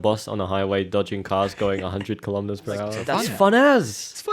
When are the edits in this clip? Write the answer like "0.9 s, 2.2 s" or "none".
3.0 s